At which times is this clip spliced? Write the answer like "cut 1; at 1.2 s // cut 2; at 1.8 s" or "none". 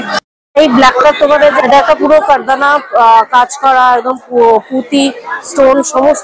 cut 1; at 1.5 s